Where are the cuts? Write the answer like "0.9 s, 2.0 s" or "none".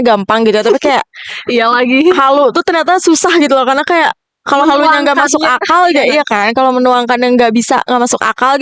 none